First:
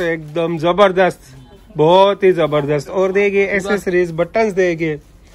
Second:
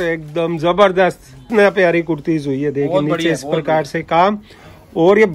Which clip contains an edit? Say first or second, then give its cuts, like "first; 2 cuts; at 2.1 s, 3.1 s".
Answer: second; 1 cut; at 1.5 s